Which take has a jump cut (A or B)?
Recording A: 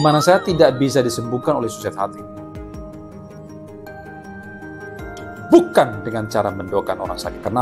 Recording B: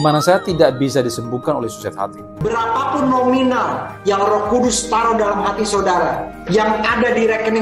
B